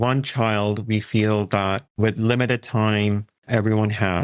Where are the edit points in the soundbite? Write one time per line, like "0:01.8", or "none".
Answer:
none